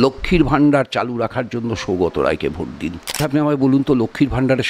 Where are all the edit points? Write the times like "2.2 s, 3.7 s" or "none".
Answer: 3.2 s